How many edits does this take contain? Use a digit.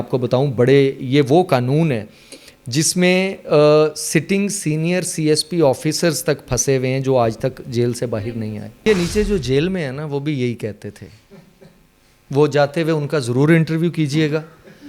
1